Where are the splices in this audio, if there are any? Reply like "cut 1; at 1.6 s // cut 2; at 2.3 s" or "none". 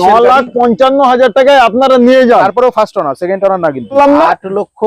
cut 1; at 4.0 s